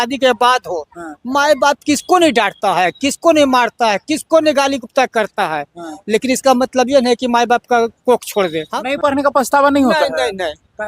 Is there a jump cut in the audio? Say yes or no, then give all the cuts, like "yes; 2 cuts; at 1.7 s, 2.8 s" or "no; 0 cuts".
yes; 1 cut; at 8.7 s